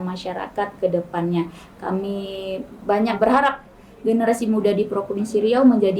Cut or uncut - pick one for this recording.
cut